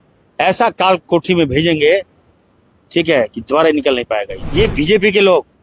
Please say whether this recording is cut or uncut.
cut